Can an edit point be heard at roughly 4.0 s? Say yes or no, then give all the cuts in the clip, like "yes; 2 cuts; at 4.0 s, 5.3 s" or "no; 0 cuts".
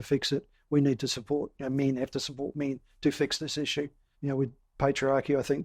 yes; 1 cut; at 4.0 s